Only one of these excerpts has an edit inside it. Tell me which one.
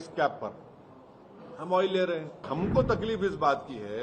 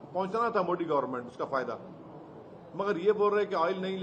first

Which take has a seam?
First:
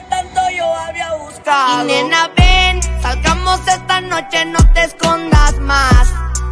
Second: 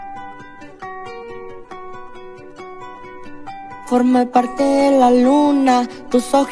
second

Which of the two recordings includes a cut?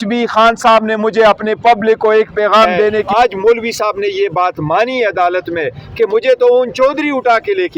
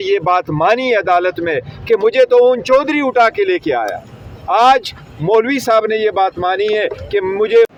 first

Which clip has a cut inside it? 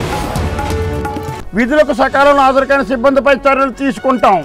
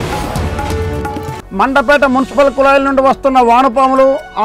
second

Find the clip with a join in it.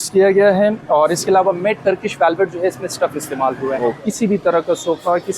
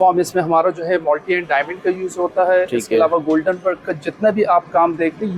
first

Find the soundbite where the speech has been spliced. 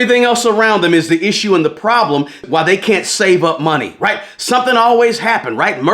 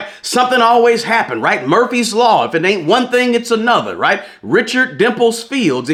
first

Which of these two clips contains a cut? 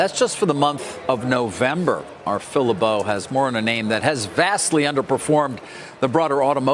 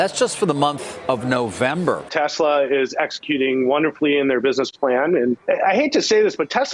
second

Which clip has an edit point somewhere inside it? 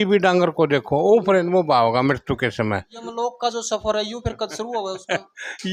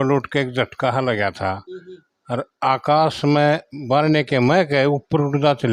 first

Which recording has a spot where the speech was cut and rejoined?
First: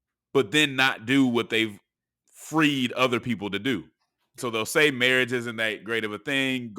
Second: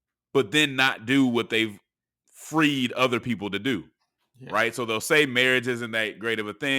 first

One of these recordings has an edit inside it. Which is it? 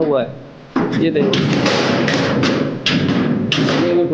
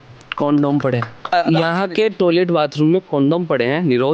second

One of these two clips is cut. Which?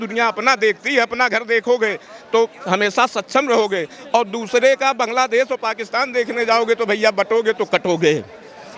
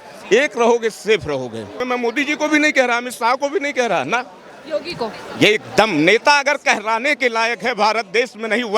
second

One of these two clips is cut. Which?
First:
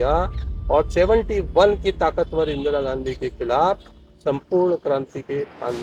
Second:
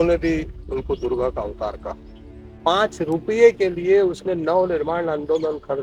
second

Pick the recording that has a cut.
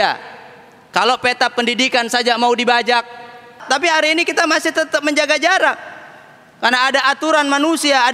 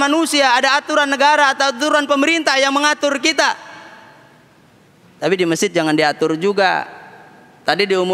first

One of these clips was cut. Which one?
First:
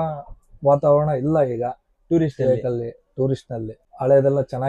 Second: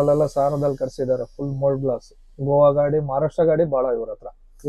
first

